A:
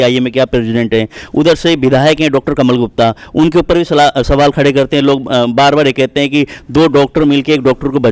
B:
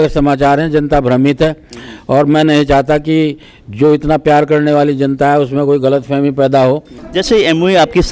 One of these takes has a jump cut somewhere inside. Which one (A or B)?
B